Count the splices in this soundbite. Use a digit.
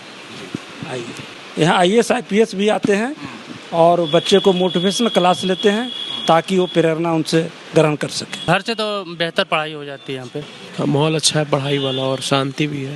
3